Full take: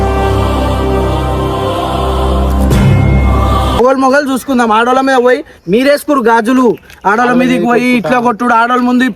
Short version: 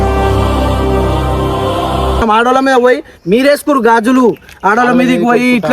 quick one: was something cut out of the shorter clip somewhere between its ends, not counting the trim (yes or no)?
yes